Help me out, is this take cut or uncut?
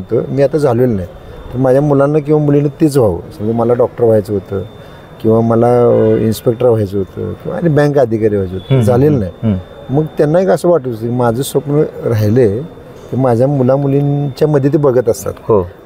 uncut